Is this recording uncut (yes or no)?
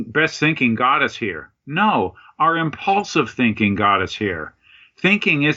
yes